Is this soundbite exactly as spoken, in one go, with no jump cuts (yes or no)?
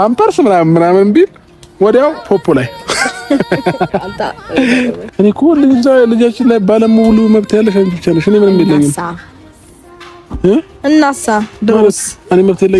no